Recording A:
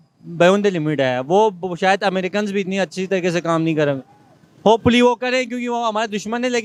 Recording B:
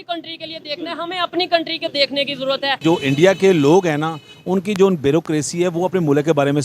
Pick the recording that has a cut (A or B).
B